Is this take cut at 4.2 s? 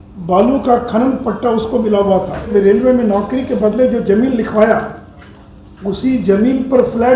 no; 1 cut; at 2.5 s

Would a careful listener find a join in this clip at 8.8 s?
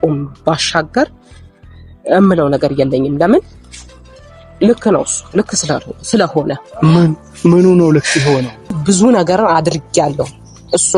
yes; 1 cut; at 8.8 s

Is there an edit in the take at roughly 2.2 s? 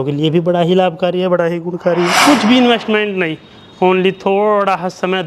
yes; 1 cut; at 2.2 s

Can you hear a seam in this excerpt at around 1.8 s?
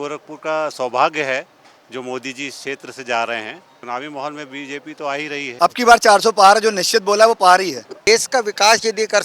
no; 3 cuts; at 3.8 s, 5.5 s, 8.1 s

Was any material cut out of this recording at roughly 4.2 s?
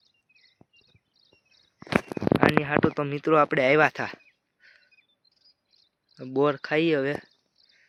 no; 0 cuts

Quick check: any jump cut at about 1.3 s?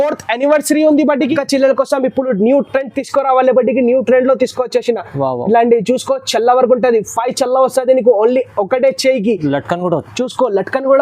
yes; 1 cut; at 1.3 s

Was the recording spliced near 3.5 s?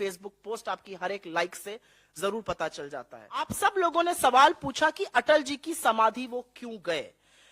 yes; 1 cut; at 3.5 s

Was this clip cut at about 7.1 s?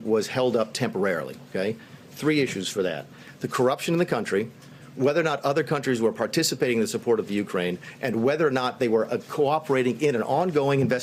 no; 0 cuts

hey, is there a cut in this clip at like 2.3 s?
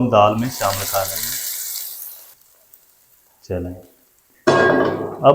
yes; 1 cut; at 2.3 s

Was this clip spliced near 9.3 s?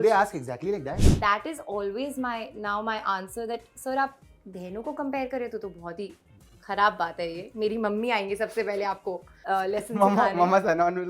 yes; 2 cuts; at 1.1 s, 9.3 s

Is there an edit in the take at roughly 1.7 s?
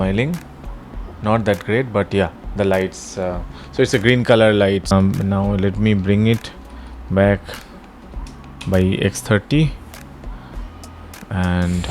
no; 1 cut; at 4.9 s

